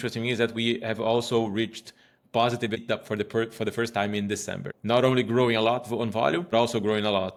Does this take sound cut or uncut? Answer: uncut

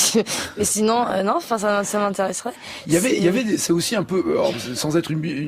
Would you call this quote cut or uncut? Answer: uncut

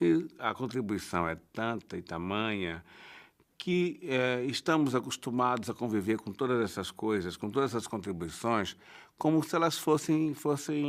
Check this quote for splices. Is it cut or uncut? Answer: cut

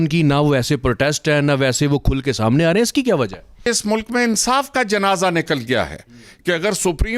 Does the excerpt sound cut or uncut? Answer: cut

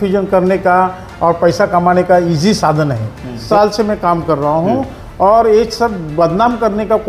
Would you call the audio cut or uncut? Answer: cut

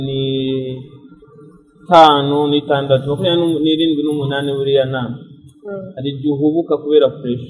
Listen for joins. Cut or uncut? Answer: uncut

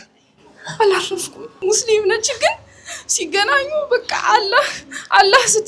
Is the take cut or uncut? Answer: cut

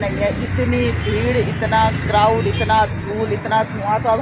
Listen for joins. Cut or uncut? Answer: uncut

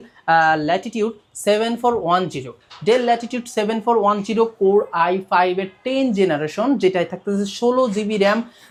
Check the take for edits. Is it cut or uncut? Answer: uncut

